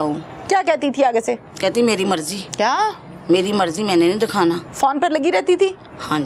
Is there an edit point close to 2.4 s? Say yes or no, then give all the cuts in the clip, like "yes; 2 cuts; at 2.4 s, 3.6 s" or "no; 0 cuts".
yes; 2 cuts; at 2.4 s, 4.7 s